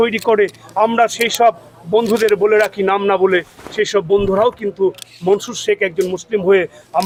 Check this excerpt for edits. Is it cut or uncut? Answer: uncut